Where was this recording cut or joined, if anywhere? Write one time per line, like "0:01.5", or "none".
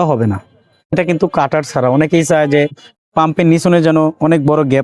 0:00.9